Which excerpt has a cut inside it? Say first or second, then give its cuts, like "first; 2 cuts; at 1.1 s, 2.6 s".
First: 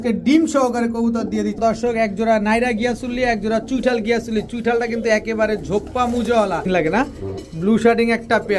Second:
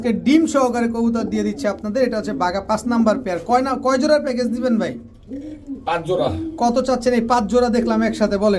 first; 2 cuts; at 1.6 s, 6.7 s